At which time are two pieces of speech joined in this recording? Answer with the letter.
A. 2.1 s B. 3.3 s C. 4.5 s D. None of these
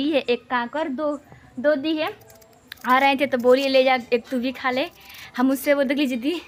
D